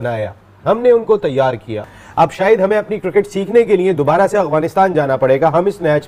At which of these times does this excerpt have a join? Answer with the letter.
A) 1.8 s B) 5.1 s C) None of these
A